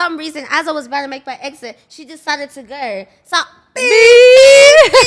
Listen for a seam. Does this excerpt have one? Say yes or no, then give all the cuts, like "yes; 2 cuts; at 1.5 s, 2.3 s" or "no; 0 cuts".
no; 0 cuts